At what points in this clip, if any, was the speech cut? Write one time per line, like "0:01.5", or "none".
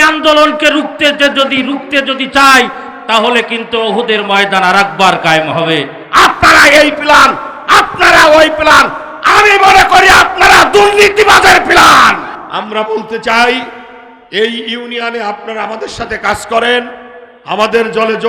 0:06.0
0:12.3